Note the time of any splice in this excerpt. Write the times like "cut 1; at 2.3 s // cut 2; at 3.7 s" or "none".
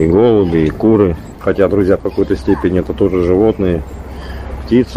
cut 1; at 1.3 s

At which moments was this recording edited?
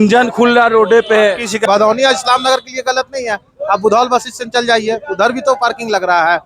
cut 1; at 1.6 s

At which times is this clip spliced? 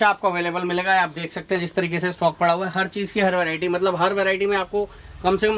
none

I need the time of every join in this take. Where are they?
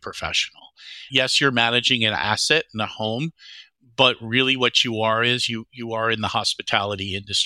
cut 1; at 1.1 s

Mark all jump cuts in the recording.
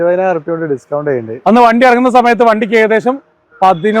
cut 1; at 1.3 s

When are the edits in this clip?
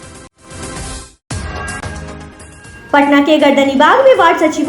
cut 1; at 2.5 s

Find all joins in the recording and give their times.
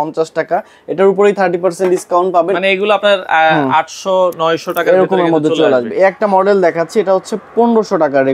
none

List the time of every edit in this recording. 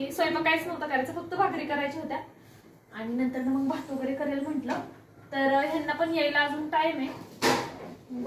none

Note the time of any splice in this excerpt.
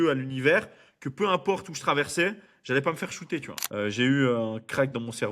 cut 1; at 3.6 s

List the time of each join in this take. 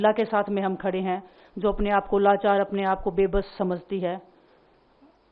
none

